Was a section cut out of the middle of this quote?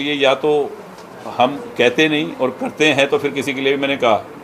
no; 0 cuts

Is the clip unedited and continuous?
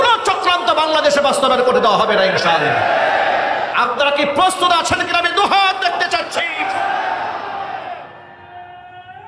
yes; 0 cuts

